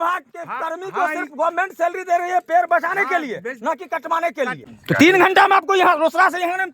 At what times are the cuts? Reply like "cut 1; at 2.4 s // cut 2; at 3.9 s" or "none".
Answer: cut 1; at 4.7 s